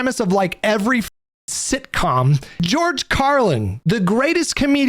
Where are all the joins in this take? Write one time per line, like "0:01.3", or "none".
0:02.6
0:03.7